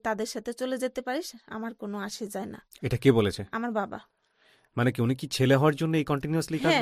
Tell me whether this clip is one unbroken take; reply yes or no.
yes